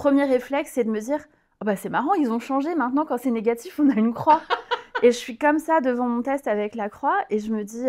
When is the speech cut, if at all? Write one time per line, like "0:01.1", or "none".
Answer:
none